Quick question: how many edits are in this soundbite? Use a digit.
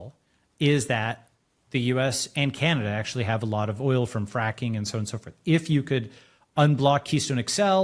0